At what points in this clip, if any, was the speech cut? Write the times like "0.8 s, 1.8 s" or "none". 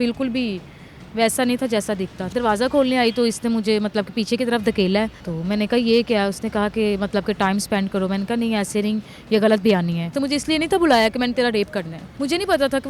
2.2 s, 5.2 s, 10.1 s, 12.0 s